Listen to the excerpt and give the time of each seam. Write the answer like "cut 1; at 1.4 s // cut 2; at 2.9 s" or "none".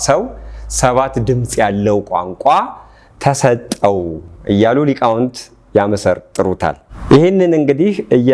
none

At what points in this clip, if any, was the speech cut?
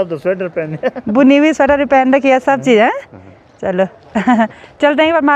none

